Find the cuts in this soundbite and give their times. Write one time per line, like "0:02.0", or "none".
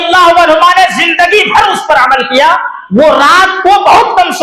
0:02.8